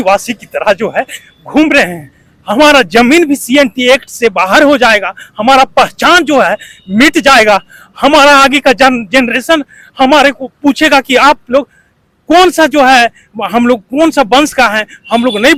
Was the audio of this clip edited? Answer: no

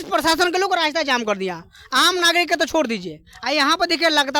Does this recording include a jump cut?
no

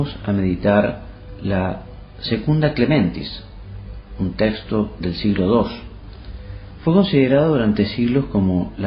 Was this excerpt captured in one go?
no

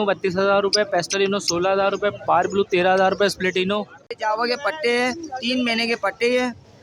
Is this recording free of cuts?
no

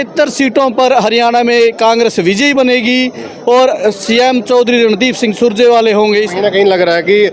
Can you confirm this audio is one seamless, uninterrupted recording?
no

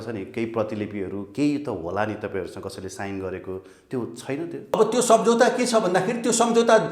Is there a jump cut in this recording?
yes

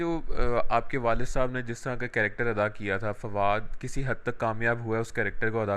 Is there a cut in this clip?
no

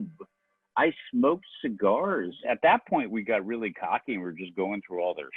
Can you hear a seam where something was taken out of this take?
yes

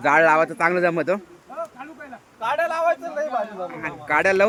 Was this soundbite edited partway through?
no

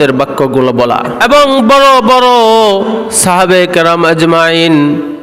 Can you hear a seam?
yes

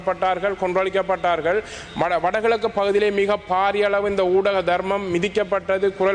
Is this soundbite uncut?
yes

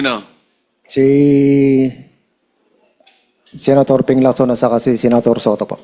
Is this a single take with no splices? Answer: yes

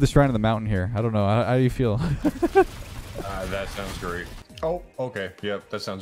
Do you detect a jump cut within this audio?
yes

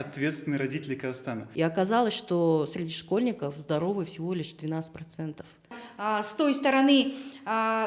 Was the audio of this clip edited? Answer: yes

